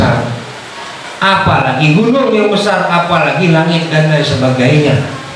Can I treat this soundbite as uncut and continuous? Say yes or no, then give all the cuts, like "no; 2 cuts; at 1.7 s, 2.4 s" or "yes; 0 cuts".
yes; 0 cuts